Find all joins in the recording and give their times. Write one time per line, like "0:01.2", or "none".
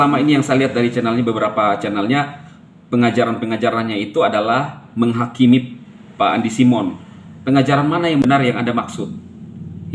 0:08.2